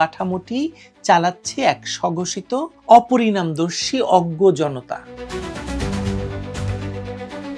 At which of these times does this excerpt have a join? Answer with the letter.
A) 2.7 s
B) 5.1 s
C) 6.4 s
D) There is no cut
B